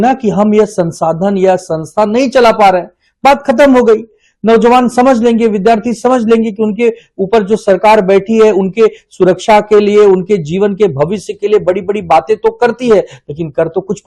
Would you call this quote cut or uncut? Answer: uncut